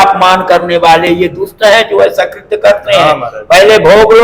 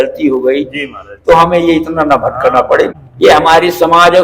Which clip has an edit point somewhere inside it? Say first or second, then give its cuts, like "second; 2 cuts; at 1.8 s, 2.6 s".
second; 1 cut; at 2.9 s